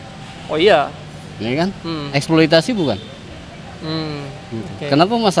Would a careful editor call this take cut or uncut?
uncut